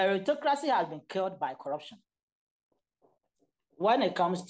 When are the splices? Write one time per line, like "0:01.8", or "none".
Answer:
0:02.7

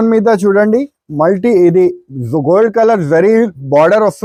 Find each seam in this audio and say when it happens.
none

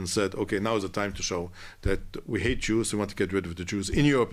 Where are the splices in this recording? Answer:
none

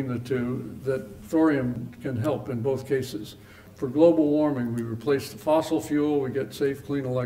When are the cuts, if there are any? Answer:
0:01.1
0:01.9
0:03.6

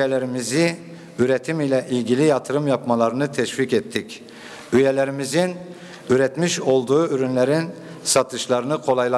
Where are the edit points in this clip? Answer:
none

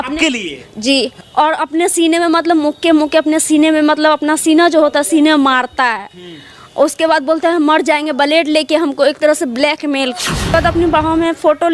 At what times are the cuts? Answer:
0:01.2
0:10.5

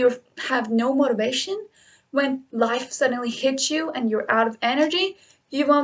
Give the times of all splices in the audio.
none

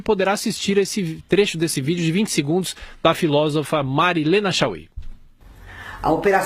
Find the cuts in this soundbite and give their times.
0:05.2

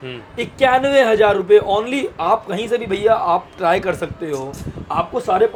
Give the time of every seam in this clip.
none

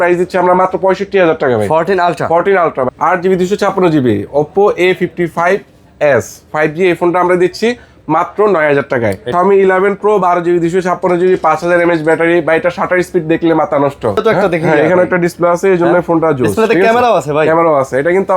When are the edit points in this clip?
0:02.9
0:09.3
0:14.2

